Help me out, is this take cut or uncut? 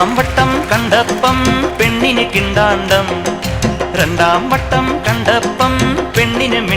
uncut